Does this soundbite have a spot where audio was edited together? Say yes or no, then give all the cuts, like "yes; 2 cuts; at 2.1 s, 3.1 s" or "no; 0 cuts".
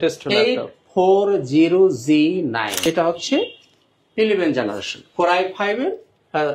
yes; 1 cut; at 2.7 s